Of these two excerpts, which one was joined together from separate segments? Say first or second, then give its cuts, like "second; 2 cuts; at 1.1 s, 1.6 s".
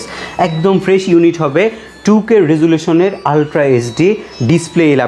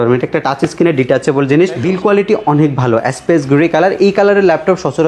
second; 1 cut; at 1.8 s